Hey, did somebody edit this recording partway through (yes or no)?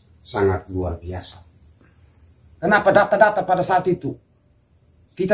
yes